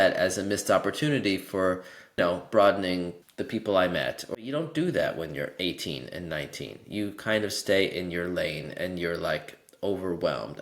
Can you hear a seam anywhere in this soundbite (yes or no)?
yes